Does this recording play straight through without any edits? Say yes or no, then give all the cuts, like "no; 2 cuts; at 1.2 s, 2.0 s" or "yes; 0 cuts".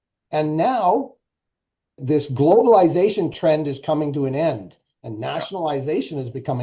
no; 1 cut; at 2.0 s